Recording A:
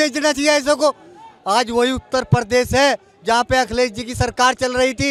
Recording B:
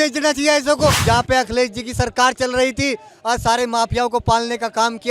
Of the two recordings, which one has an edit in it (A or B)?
B